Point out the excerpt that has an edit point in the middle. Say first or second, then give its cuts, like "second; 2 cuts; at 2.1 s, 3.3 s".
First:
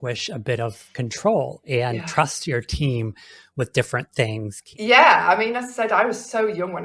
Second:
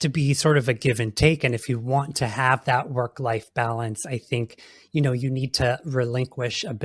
first; 1 cut; at 4.6 s